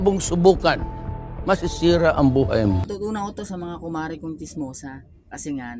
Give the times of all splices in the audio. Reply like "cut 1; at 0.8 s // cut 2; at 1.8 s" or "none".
none